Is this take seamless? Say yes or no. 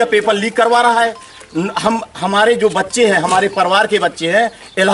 yes